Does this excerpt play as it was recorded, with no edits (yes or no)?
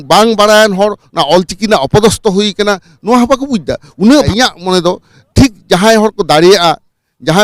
no